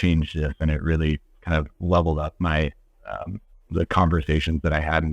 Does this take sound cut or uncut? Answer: uncut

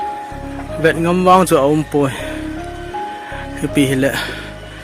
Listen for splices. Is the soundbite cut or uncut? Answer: cut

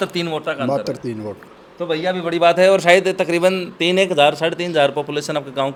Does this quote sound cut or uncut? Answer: uncut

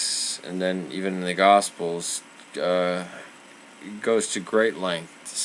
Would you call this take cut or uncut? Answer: cut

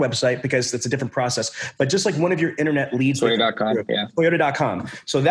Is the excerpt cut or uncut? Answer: uncut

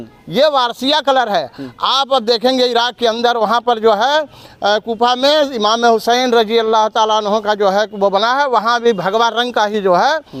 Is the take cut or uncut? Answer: uncut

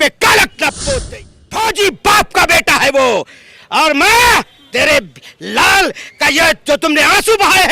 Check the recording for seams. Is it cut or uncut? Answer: cut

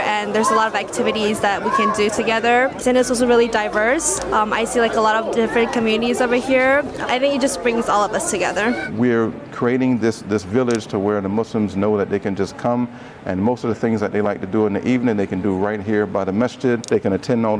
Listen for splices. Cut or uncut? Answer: uncut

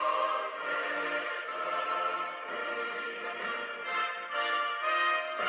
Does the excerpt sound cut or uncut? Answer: uncut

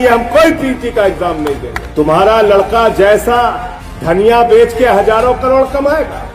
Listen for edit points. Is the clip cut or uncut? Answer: cut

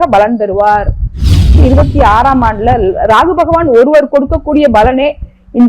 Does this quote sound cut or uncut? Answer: cut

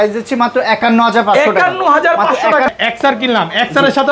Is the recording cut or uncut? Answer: cut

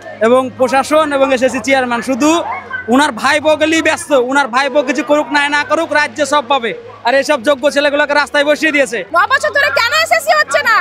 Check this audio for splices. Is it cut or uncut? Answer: cut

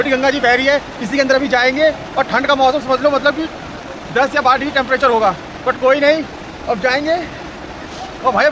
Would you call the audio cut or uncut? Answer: uncut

